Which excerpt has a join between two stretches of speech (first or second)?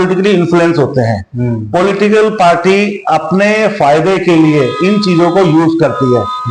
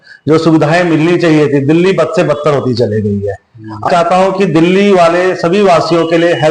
second